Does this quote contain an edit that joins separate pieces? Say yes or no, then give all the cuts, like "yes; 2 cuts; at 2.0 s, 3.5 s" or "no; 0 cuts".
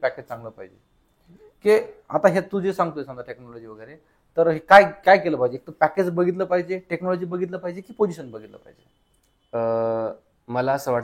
no; 0 cuts